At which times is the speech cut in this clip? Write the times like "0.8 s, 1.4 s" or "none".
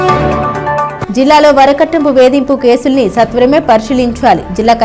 none